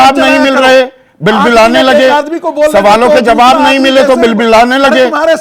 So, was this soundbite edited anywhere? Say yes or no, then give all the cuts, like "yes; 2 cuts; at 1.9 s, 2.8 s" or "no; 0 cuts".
no; 0 cuts